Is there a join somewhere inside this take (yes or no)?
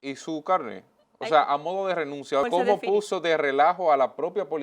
yes